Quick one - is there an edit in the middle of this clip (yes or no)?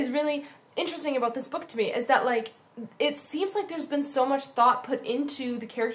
no